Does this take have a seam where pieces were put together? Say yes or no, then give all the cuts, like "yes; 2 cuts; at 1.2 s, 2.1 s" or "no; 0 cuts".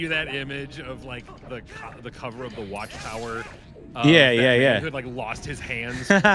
no; 0 cuts